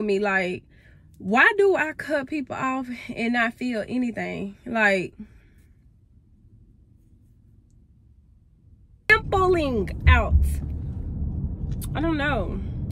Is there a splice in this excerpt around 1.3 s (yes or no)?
no